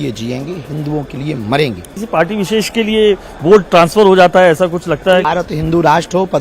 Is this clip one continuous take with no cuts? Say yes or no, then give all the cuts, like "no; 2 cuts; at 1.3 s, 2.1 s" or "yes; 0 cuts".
no; 2 cuts; at 2.0 s, 5.2 s